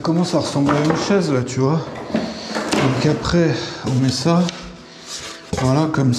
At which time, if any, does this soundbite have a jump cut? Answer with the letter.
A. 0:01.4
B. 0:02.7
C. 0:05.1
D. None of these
D